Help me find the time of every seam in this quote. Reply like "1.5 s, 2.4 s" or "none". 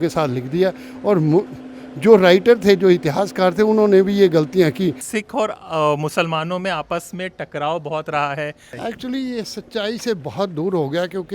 5.0 s, 8.7 s